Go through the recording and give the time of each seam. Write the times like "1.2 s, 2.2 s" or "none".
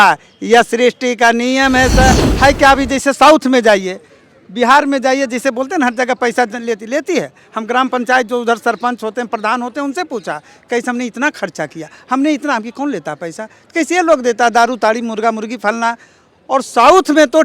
2.1 s